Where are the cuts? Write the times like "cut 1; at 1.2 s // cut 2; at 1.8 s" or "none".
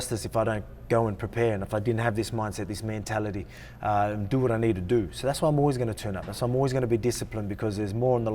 none